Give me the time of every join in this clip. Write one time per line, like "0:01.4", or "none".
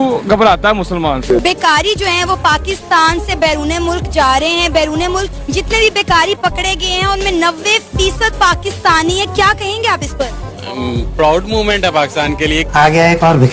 none